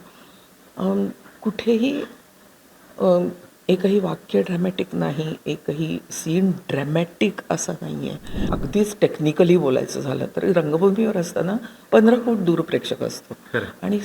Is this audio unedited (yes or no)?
no